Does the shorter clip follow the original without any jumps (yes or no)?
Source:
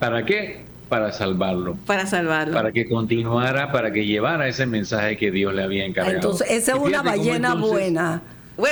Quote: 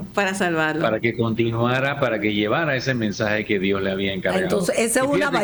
yes